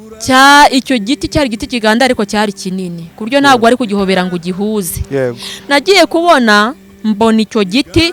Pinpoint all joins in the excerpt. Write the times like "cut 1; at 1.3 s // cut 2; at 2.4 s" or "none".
none